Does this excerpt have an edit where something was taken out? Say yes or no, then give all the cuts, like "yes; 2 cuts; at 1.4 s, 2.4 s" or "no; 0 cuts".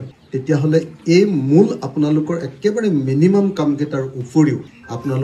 no; 0 cuts